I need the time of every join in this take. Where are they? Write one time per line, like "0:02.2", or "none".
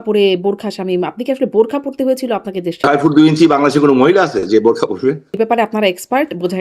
0:02.8
0:05.4